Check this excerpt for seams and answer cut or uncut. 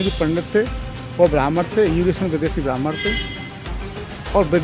uncut